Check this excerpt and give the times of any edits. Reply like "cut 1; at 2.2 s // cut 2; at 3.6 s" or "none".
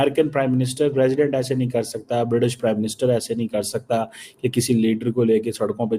none

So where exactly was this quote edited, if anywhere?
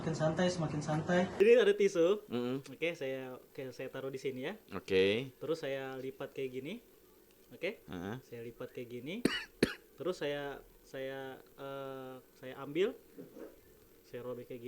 cut 1; at 1.3 s

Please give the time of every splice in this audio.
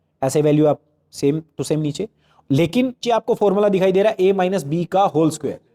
cut 1; at 3.0 s

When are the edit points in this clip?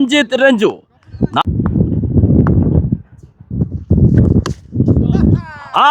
cut 1; at 1.4 s

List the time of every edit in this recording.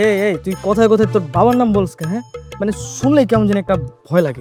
none

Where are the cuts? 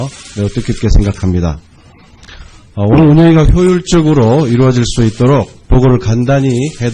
cut 1; at 3.0 s

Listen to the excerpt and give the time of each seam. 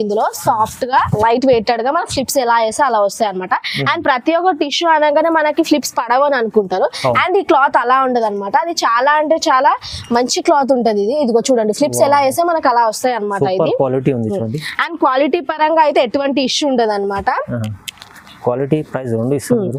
none

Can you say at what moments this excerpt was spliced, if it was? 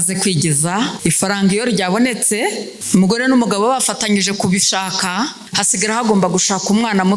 cut 1; at 0.9 s // cut 2; at 2.7 s // cut 3; at 5.5 s

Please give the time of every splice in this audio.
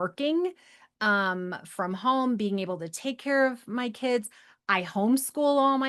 none

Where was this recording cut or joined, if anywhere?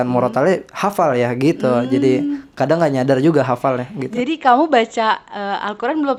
none

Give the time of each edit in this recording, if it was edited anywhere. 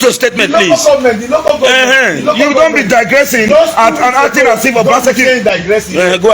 none

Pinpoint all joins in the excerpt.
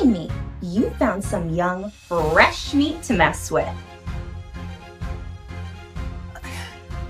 cut 1; at 3.7 s

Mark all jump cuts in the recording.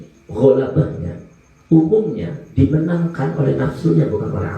none

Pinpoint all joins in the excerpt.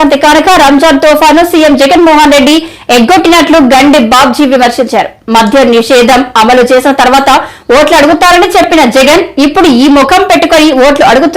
none

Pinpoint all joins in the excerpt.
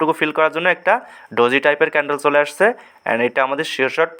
none

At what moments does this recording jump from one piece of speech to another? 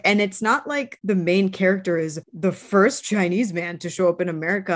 cut 1; at 0.9 s // cut 2; at 2.2 s

